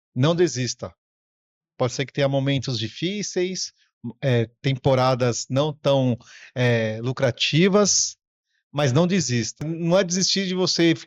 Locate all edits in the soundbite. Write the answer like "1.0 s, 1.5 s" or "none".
9.7 s